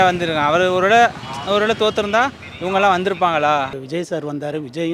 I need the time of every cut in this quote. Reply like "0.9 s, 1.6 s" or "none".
3.8 s

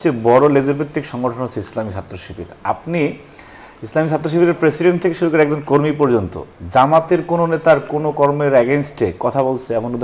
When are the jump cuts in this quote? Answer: none

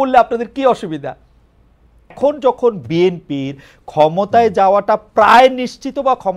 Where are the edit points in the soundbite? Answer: 2.1 s

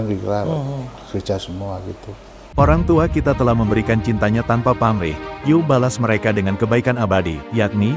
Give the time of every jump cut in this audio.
2.6 s

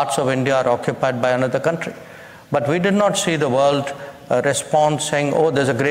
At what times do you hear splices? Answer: none

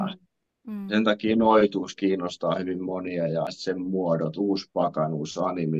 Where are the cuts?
3.5 s

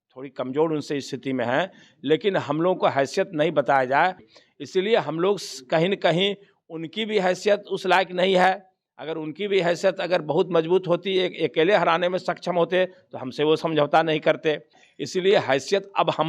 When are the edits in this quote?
4.4 s, 14.9 s

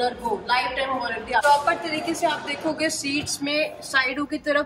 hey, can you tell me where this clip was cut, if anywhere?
1.4 s

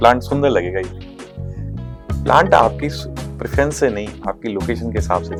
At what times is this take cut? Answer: none

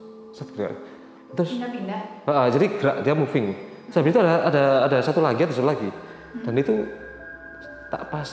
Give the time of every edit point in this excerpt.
none

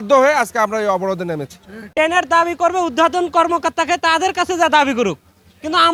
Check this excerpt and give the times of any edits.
none

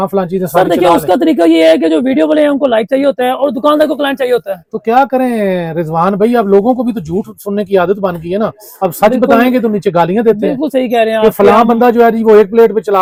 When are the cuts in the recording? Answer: none

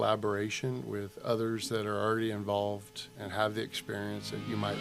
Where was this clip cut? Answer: none

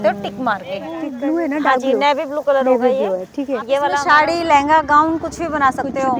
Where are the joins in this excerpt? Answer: 1.0 s, 4.0 s

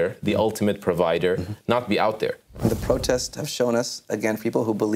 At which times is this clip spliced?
2.6 s

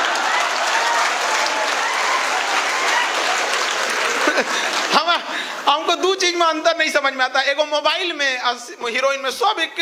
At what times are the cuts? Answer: none

